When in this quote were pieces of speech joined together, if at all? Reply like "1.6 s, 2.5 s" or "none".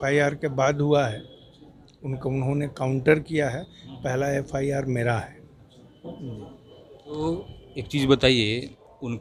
none